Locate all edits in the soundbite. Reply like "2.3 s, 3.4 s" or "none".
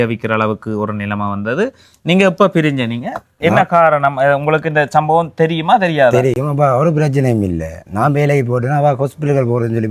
none